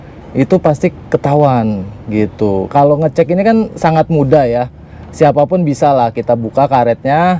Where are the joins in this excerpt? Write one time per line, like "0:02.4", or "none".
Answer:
0:02.7